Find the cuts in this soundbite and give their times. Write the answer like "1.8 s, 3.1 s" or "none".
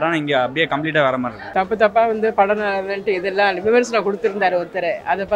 1.4 s